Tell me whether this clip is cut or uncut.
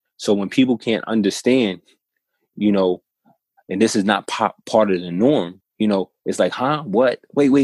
cut